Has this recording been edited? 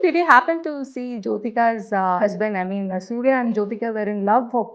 yes; 1 cut; at 2.2 s

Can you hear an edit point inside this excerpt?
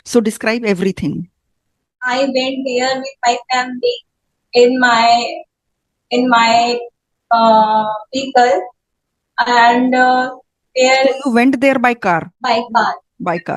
yes; 2 cuts; at 2.0 s, 12.3 s

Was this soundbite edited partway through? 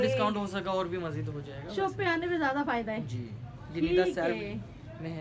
no; 0 cuts

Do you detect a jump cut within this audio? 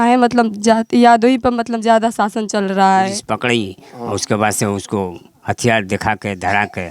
yes; 1 cut; at 3.2 s

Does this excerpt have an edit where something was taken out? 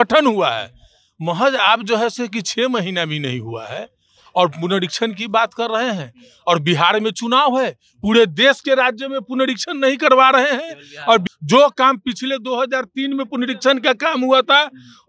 yes; 1 cut; at 11.3 s

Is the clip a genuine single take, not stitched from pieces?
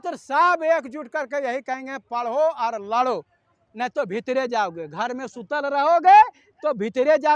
yes; 0 cuts

